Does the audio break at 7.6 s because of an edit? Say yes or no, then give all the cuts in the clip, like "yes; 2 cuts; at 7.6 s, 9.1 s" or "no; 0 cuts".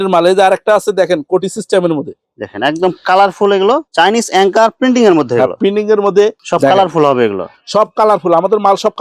no; 2 cuts; at 3.9 s, 6.4 s